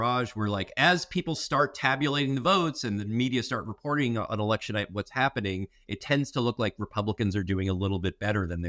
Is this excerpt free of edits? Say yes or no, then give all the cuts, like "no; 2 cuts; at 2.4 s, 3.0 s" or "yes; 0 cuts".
yes; 0 cuts